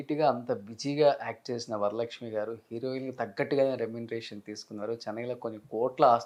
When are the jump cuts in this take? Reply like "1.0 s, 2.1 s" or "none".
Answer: none